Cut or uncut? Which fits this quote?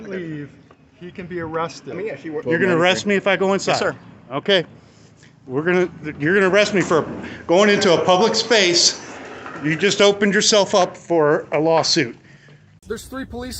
cut